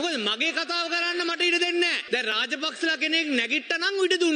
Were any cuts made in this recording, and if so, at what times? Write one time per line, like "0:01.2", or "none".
0:02.0